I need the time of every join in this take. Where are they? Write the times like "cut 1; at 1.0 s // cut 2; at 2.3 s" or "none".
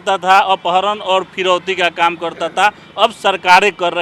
none